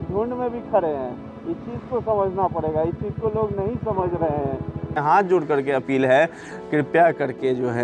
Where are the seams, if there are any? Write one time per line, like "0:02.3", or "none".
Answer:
0:05.0